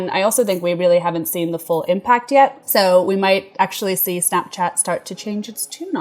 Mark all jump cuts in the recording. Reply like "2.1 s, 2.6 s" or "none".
2.6 s